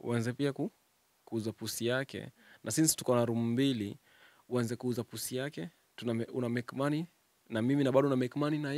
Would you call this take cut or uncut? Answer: uncut